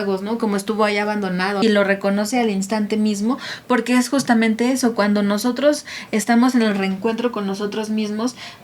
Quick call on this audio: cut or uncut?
cut